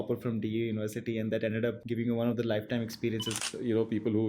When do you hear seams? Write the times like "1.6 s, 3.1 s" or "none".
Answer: 1.8 s, 3.4 s